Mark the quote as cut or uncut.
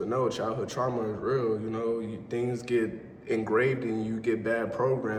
uncut